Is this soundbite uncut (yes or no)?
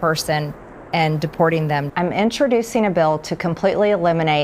no